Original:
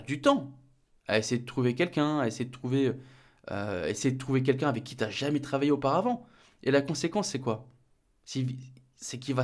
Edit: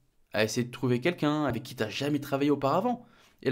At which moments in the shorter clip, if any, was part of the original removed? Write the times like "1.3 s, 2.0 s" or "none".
1.5 s